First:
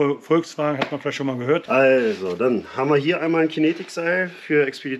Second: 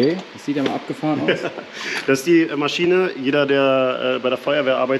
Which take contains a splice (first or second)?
first